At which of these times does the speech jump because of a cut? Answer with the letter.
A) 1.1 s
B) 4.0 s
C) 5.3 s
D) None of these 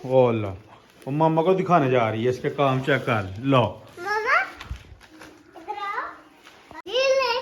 D